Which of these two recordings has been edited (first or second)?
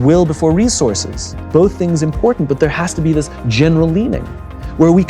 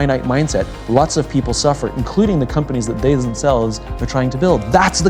first